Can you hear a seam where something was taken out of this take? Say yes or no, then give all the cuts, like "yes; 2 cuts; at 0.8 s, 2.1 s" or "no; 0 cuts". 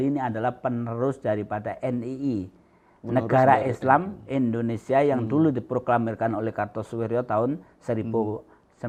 no; 0 cuts